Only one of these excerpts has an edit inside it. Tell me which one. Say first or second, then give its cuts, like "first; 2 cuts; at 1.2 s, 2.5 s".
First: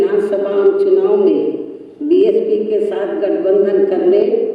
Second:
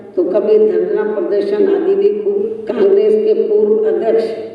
second; 1 cut; at 2.4 s